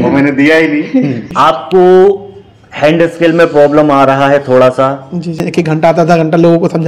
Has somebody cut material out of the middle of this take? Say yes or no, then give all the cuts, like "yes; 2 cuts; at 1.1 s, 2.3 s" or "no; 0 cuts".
yes; 2 cuts; at 1.2 s, 5.4 s